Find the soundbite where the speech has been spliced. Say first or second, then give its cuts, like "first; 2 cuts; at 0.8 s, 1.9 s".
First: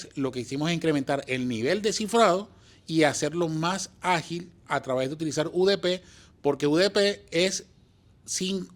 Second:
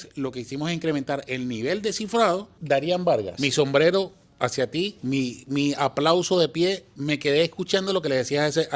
second; 3 cuts; at 2.5 s, 3.3 s, 5.0 s